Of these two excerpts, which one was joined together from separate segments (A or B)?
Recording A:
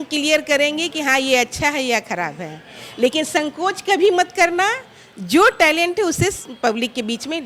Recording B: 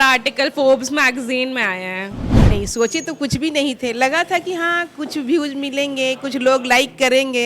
B